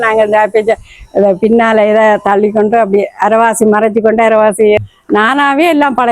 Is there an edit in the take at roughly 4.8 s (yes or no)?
yes